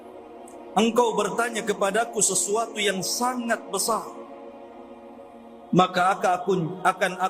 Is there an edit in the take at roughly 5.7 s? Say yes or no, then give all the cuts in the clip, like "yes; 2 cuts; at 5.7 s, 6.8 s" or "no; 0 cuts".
yes; 3 cuts; at 0.7 s, 4.2 s, 5.7 s